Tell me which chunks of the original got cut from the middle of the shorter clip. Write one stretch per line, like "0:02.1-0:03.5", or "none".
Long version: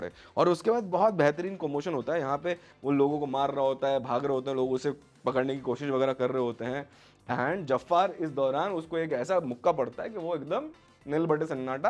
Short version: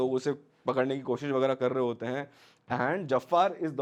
none